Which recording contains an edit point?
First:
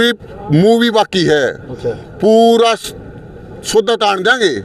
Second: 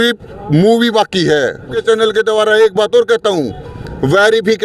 second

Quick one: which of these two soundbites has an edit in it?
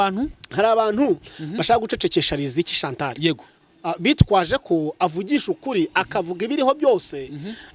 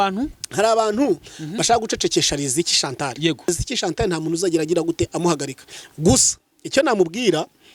second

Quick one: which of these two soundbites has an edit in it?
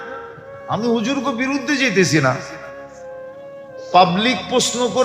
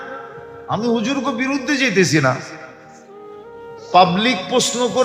first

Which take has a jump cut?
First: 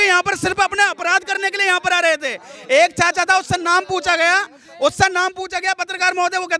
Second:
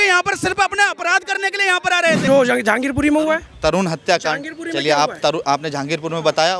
second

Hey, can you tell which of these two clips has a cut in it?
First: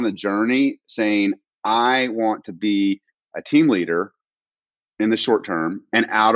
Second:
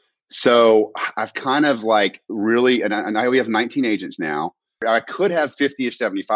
second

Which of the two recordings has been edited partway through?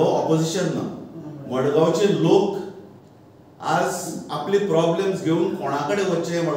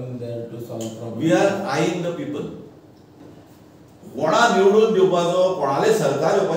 second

